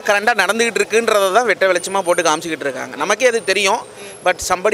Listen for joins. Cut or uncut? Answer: uncut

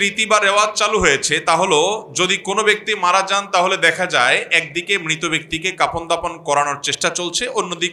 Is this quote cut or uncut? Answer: uncut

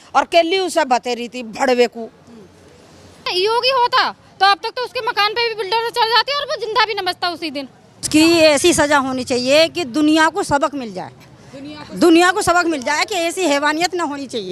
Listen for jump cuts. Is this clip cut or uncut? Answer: cut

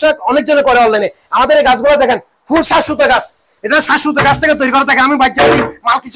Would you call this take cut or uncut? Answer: uncut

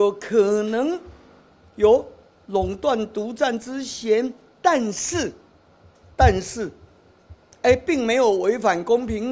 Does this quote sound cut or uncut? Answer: uncut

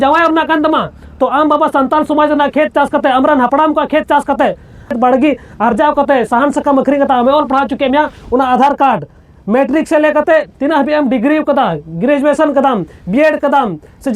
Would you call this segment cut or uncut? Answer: cut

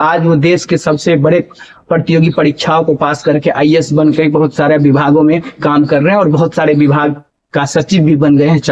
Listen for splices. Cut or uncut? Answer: uncut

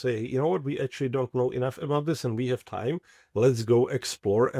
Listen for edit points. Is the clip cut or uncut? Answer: uncut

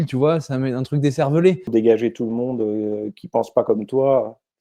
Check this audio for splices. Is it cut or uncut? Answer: cut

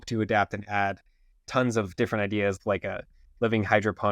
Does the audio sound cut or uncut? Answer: cut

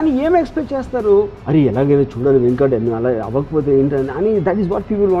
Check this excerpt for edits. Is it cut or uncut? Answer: uncut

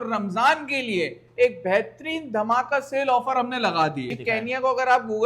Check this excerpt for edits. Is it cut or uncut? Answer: cut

